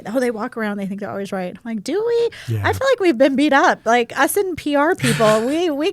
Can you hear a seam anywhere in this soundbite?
no; 0 cuts

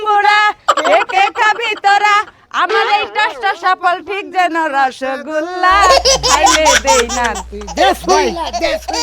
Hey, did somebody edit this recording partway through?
no; 0 cuts

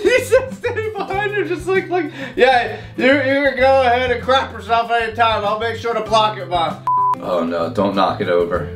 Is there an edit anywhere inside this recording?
yes; 1 cut; at 7.1 s

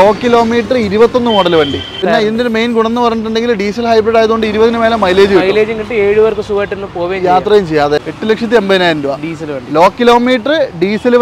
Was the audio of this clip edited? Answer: yes; 2 cuts; at 2.0 s, 8.0 s

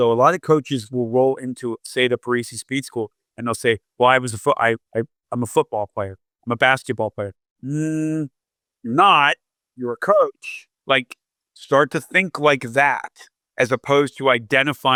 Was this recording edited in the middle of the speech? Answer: no; 0 cuts

